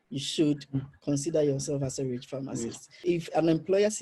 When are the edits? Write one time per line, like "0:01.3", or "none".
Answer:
0:02.9